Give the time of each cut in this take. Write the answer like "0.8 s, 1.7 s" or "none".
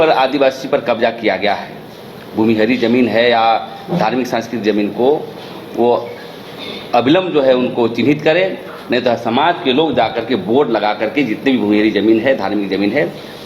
none